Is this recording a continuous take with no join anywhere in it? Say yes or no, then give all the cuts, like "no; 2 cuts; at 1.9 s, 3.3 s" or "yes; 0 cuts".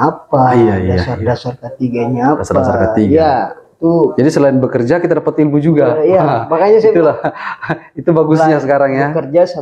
yes; 0 cuts